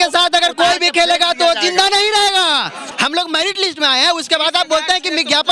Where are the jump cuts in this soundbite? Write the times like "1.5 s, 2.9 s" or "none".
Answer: 2.8 s

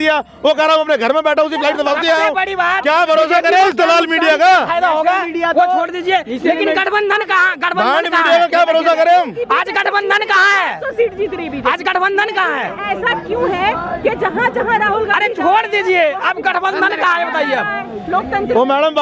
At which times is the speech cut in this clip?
none

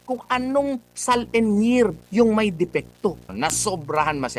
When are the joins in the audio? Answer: 3.3 s

